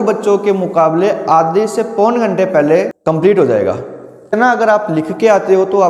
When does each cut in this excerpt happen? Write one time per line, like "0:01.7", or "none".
0:02.9
0:04.3